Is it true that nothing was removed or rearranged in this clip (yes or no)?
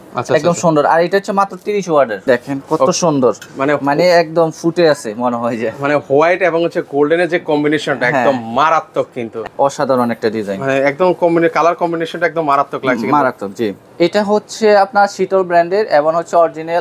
no